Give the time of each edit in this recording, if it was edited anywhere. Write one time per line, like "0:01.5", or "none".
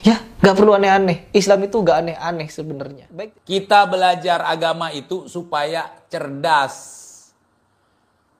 0:03.0